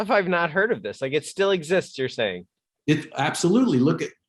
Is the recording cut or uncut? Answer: uncut